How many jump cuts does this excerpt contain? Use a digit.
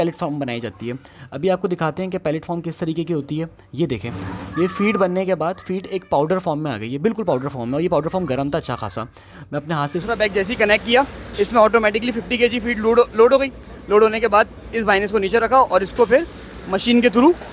1